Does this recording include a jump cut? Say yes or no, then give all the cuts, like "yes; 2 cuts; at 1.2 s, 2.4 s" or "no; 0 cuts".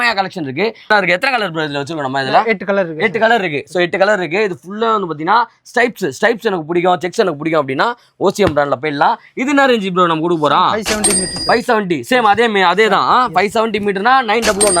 yes; 1 cut; at 0.9 s